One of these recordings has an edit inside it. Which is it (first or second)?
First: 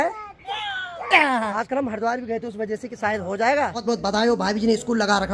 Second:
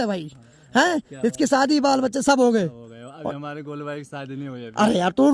first